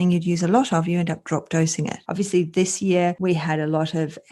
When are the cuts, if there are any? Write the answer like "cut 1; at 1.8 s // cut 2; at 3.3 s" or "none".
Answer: cut 1; at 2.0 s

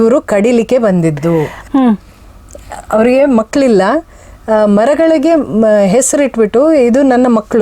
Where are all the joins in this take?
cut 1; at 1.6 s

